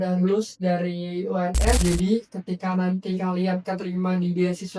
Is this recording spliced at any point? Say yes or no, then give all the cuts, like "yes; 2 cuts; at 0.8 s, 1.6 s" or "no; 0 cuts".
yes; 1 cut; at 1.8 s